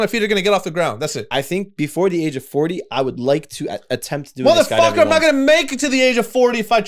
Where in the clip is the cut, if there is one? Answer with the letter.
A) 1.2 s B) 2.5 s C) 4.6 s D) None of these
A